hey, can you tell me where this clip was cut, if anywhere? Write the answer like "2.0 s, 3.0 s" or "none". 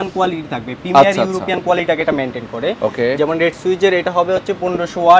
none